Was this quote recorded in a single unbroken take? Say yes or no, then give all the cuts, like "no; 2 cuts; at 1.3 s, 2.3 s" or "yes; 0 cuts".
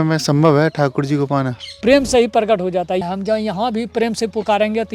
no; 2 cuts; at 1.8 s, 3.0 s